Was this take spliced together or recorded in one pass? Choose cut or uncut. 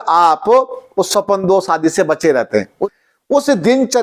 cut